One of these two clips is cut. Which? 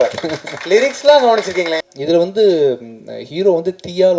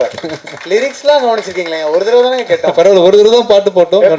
first; 1 cut; at 1.8 s

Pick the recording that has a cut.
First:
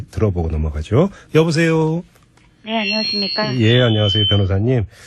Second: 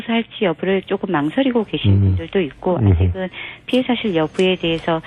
first; 1 cut; at 2.6 s

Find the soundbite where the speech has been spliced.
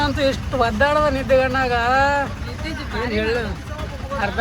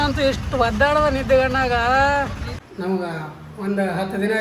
second; 1 cut; at 2.6 s

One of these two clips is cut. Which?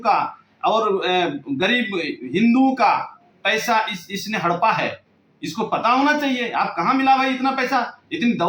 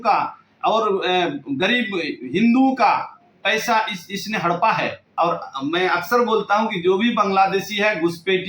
second; 1 cut; at 5.0 s

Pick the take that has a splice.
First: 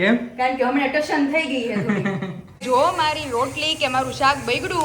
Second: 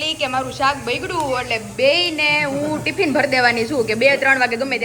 first; 1 cut; at 2.6 s

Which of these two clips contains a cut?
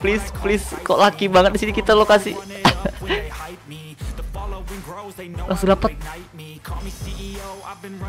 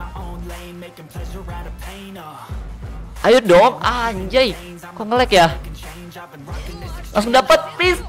second; 3 cuts; at 3.2 s, 5.6 s, 7.1 s

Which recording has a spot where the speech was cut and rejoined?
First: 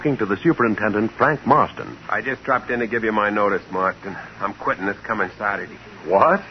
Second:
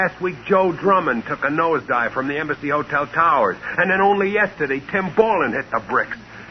second; 1 cut; at 3.4 s

